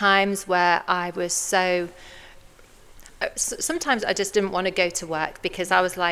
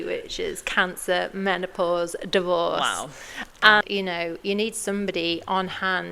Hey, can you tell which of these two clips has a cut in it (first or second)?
second